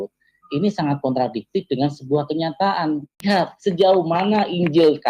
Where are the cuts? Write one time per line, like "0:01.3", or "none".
0:03.2

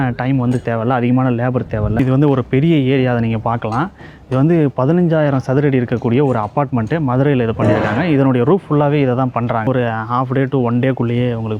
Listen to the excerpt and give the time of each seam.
0:02.0
0:09.7

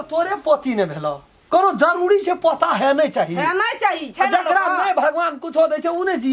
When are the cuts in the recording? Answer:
0:01.3

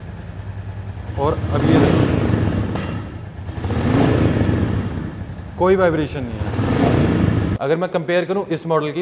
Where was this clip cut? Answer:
0:07.6

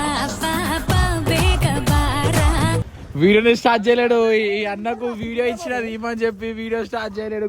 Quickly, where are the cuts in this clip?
0:02.9

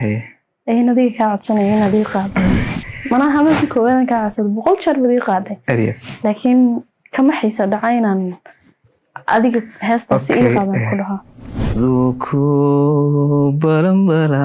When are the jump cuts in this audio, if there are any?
0:02.7
0:11.8

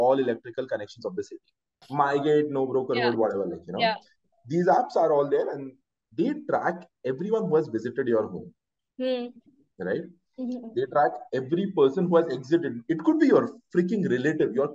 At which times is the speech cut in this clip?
0:01.9

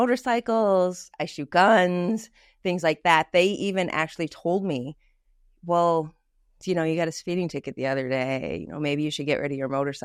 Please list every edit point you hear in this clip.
none

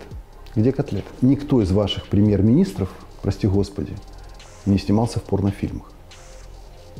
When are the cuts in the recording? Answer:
0:01.1

